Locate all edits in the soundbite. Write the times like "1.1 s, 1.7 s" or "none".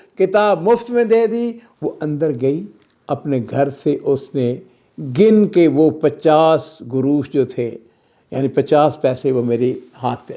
1.7 s